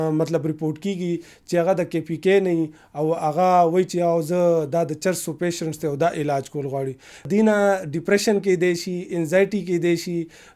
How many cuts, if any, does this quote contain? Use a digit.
1